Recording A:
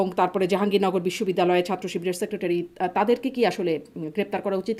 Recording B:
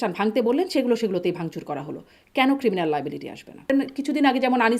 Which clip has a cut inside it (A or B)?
B